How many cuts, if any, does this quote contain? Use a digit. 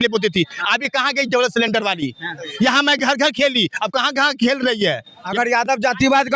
2